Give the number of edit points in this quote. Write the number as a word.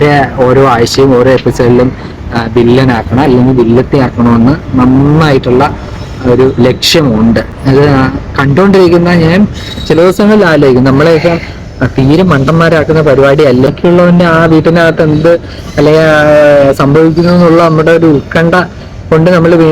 one